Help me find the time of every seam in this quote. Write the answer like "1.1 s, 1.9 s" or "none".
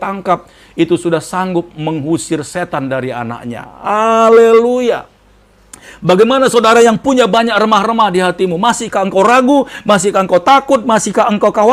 none

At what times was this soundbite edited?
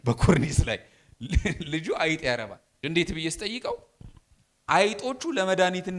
2.7 s

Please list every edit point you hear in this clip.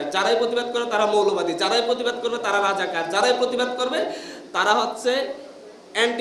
none

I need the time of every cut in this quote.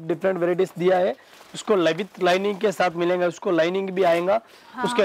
none

